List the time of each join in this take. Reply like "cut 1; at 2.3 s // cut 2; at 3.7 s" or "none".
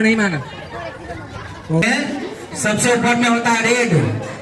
cut 1; at 1.8 s